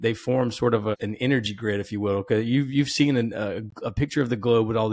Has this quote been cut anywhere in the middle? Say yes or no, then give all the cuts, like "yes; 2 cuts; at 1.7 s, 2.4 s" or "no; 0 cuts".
yes; 1 cut; at 1.0 s